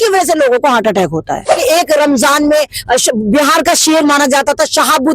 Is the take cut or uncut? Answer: cut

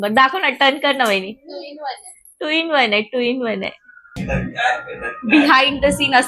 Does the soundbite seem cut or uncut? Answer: cut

